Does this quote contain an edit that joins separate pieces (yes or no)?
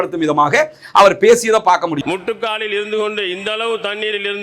yes